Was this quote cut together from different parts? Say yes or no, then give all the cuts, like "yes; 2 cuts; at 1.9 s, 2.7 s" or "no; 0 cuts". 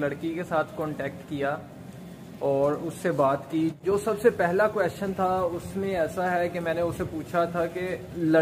yes; 1 cut; at 3.8 s